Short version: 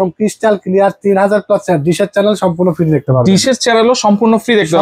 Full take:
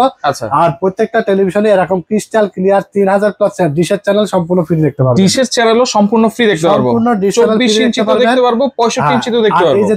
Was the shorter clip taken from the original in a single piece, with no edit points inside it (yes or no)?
yes